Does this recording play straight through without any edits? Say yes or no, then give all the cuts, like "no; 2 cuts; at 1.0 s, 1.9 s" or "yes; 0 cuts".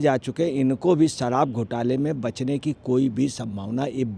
yes; 0 cuts